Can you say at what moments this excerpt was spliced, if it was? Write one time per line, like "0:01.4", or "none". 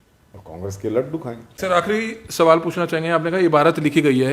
0:01.4